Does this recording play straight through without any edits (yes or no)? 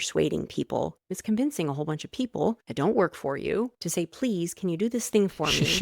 no